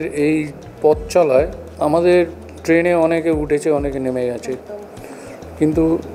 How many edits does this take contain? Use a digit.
2